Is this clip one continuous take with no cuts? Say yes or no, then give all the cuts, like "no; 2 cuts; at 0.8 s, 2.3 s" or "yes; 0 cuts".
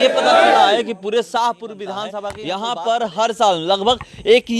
no; 1 cut; at 2.3 s